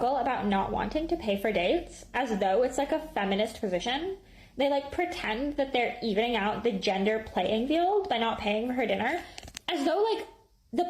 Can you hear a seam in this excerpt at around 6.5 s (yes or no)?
no